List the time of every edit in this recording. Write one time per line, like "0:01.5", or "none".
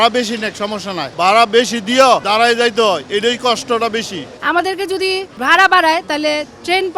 0:01.1
0:04.3